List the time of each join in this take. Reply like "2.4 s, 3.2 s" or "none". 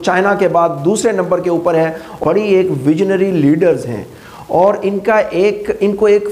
2.2 s